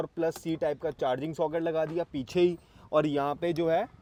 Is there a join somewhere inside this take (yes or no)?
no